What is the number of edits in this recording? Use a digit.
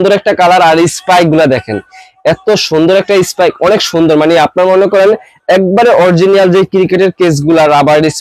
0